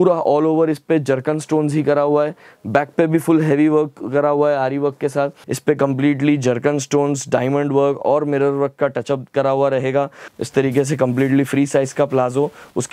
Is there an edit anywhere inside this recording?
yes; 2 cuts; at 5.4 s, 10.2 s

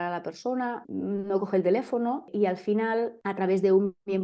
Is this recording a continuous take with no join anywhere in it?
no; 3 cuts; at 0.8 s, 2.3 s, 3.2 s

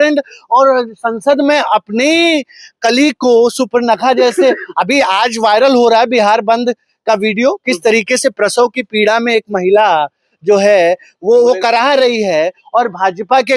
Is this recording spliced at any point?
no; 0 cuts

